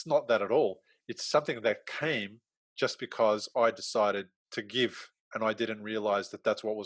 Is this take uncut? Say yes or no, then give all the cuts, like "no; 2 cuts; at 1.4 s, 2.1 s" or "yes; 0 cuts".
no; 2 cuts; at 4.4 s, 5.1 s